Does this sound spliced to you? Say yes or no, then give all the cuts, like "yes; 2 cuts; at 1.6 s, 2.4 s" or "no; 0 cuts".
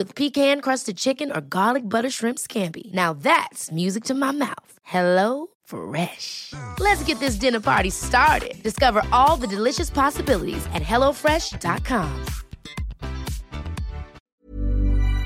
yes; 1 cut; at 14.2 s